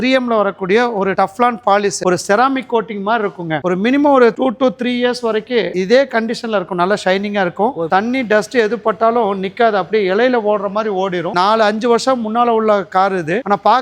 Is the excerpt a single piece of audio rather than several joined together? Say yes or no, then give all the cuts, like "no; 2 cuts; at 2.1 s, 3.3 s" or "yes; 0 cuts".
no; 3 cuts; at 2.0 s, 7.9 s, 11.3 s